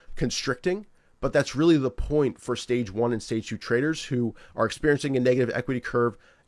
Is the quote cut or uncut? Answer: uncut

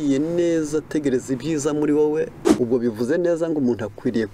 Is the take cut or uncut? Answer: cut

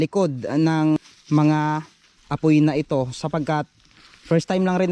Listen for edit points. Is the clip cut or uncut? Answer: cut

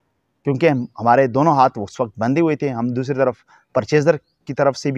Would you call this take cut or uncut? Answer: uncut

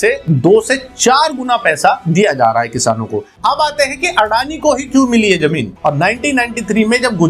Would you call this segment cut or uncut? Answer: cut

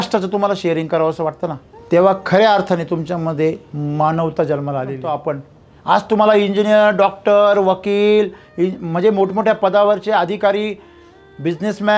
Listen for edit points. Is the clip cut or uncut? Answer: cut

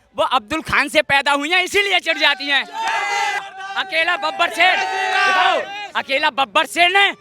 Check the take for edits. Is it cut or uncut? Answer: cut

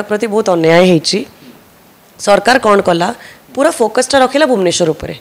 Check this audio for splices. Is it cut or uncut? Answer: uncut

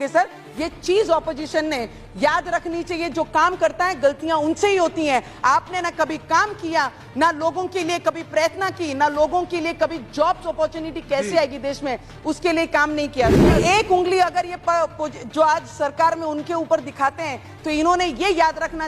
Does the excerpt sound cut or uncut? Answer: cut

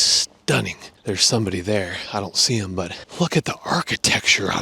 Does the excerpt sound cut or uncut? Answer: cut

